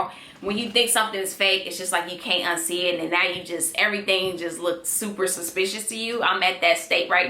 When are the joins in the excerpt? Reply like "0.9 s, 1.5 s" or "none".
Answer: none